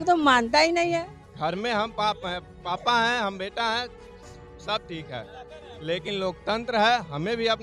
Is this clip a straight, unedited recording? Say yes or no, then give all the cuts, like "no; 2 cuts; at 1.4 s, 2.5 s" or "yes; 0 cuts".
no; 1 cut; at 1.2 s